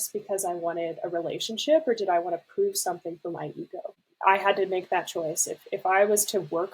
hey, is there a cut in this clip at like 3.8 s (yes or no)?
yes